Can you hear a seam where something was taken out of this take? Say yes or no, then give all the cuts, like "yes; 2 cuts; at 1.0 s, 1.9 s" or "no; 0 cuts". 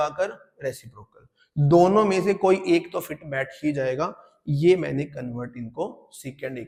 no; 0 cuts